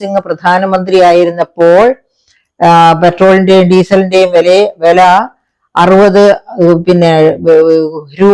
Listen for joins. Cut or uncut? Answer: uncut